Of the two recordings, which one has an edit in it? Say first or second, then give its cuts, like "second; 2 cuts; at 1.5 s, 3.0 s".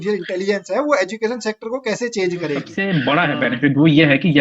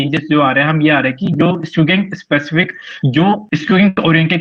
first; 1 cut; at 2.8 s